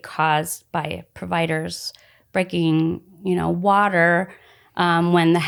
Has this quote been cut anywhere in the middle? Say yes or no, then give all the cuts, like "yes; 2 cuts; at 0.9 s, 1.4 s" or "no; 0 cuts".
no; 0 cuts